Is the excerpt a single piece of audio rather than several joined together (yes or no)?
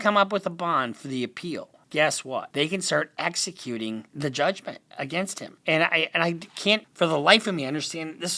no